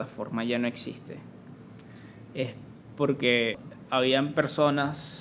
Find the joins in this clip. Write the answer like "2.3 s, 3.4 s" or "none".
3.7 s